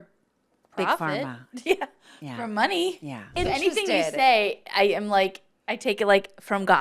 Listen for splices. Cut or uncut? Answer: cut